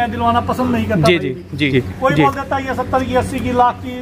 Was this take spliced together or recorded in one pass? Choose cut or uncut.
cut